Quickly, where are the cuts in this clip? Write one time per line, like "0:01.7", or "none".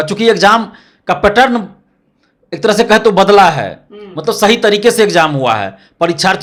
none